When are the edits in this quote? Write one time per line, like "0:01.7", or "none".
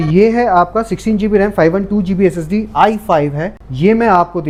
none